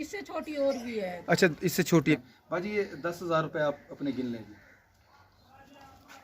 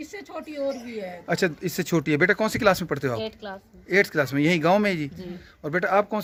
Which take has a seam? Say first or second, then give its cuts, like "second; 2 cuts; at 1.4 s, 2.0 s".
first; 1 cut; at 2.1 s